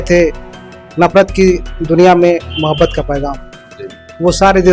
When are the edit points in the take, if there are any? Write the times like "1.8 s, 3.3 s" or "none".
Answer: none